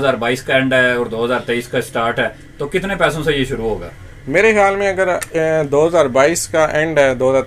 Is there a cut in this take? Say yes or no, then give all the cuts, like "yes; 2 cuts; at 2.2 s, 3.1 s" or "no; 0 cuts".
no; 0 cuts